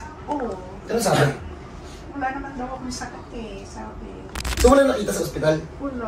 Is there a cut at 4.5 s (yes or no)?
yes